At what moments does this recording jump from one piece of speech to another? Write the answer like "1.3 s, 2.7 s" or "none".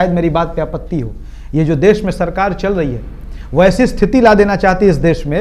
none